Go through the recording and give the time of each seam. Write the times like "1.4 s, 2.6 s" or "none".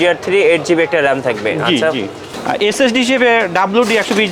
none